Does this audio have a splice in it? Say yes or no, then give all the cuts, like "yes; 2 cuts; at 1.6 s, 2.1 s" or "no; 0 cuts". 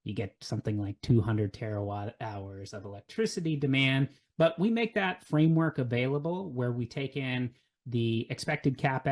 no; 0 cuts